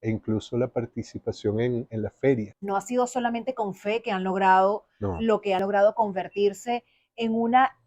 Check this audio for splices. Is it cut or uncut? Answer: cut